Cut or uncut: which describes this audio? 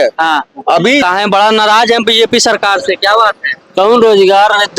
cut